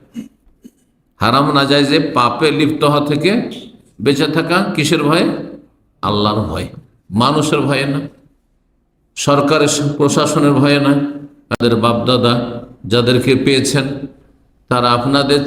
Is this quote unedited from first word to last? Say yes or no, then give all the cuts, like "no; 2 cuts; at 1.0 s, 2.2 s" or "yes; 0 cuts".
no; 1 cut; at 11.6 s